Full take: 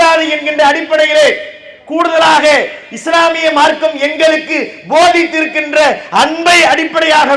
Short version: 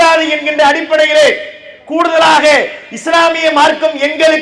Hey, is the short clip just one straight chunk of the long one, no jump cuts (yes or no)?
yes